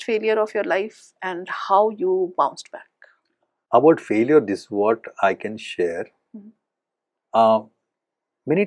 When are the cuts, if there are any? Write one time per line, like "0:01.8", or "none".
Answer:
none